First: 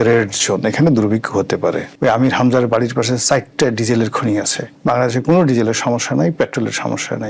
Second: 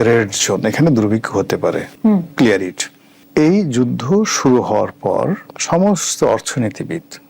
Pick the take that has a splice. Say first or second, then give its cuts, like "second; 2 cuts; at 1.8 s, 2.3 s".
first; 2 cuts; at 1.9 s, 4.7 s